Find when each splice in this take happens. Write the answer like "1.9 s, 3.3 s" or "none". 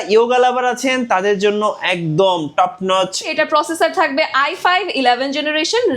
3.3 s